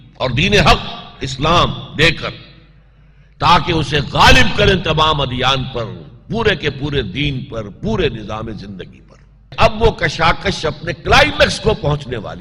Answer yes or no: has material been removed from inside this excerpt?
yes